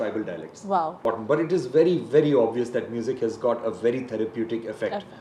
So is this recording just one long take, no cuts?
no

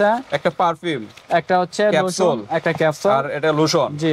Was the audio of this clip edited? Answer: no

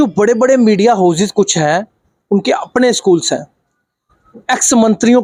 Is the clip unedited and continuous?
yes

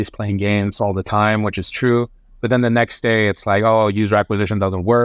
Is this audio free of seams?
yes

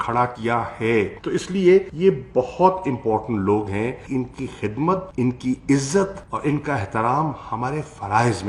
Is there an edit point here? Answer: no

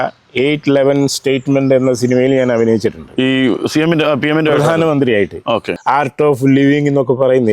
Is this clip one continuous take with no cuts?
no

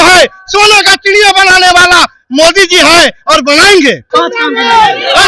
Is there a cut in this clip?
yes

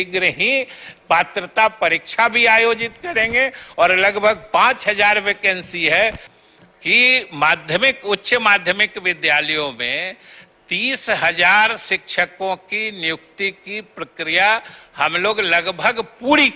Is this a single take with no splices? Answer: no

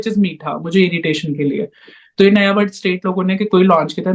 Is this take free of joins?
yes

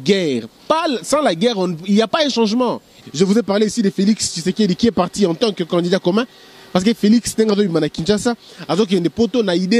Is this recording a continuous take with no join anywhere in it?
no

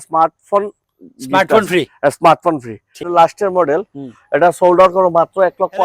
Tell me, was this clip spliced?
yes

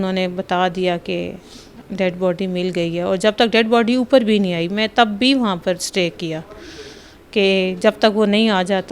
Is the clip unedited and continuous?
yes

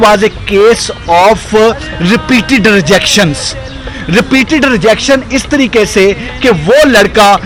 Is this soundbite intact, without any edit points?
yes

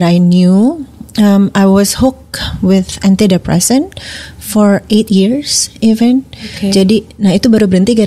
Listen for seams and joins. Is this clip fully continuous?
yes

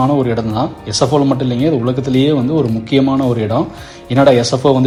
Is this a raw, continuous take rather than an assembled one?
yes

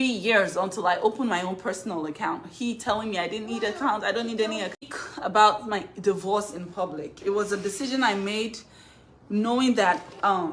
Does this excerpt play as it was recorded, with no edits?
no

